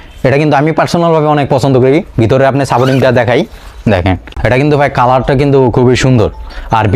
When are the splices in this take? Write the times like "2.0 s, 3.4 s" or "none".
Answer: 4.3 s

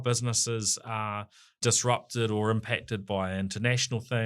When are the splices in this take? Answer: 1.6 s

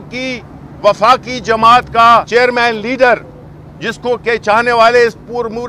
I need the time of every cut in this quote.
2.3 s

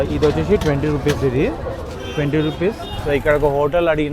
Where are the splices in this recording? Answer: 2.9 s

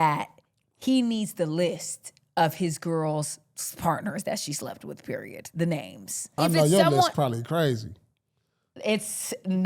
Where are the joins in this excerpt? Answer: 6.3 s

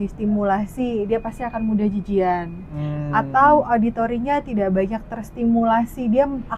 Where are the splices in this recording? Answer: none

